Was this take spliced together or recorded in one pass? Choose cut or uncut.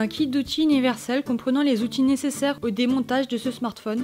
uncut